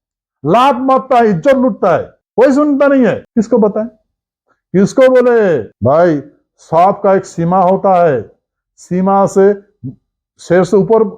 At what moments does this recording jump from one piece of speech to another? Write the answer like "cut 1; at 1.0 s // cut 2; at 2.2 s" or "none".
cut 1; at 2.2 s // cut 2; at 3.2 s // cut 3; at 5.7 s